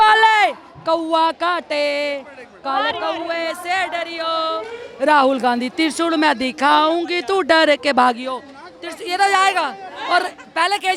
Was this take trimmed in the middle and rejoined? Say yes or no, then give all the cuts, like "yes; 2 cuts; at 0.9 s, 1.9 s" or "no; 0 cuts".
no; 0 cuts